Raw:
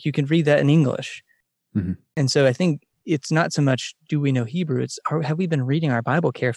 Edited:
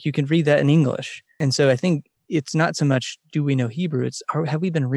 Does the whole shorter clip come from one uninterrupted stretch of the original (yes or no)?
no